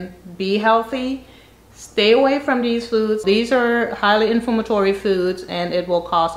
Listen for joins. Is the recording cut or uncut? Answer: cut